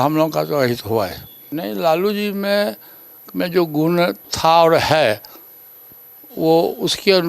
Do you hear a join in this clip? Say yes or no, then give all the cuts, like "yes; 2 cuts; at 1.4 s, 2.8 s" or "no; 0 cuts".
yes; 1 cut; at 1.5 s